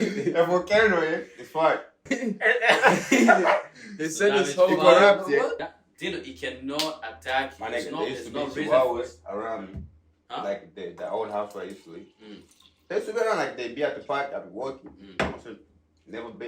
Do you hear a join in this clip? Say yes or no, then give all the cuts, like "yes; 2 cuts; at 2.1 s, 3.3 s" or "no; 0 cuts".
yes; 2 cuts; at 2.0 s, 5.6 s